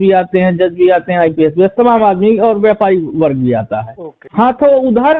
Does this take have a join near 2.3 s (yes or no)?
no